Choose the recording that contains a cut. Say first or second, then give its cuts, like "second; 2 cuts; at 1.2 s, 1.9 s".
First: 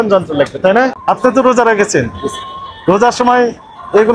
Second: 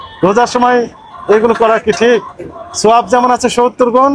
first; 1 cut; at 1.0 s